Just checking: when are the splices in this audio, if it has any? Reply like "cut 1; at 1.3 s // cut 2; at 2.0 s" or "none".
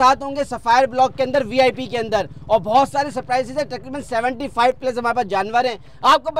none